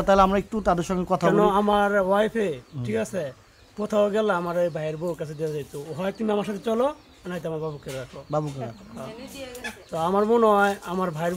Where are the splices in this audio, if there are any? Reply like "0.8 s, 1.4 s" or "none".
none